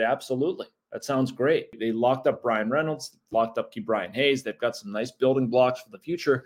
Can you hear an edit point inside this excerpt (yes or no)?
yes